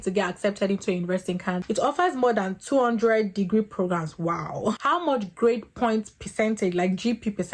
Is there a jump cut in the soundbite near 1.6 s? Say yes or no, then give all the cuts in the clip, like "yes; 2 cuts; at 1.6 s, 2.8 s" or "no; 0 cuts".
yes; 2 cuts; at 1.6 s, 4.8 s